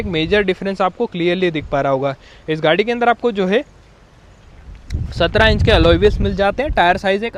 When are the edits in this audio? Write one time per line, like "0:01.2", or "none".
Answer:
none

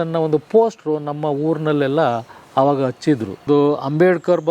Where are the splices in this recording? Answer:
0:03.4

